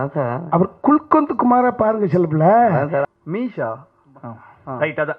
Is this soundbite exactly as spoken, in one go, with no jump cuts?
no; 1 cut; at 3.1 s

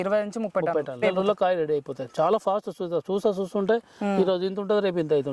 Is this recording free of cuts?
no; 1 cut; at 1.0 s

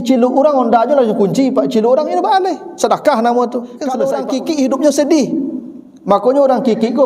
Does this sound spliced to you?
yes; 1 cut; at 4.0 s

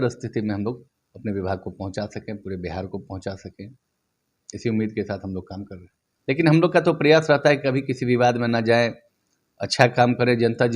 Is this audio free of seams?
no; 1 cut; at 6.1 s

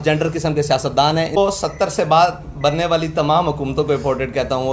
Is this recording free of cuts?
no; 1 cut; at 1.4 s

